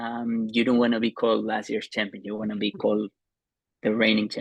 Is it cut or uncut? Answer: uncut